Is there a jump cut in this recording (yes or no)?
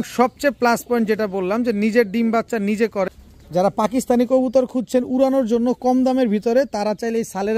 yes